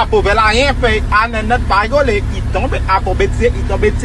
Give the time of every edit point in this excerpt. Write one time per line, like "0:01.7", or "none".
none